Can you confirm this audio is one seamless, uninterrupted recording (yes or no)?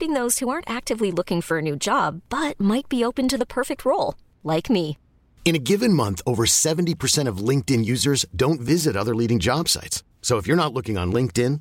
yes